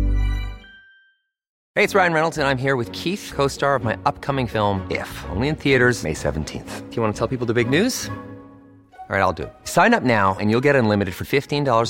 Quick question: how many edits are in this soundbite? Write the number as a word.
one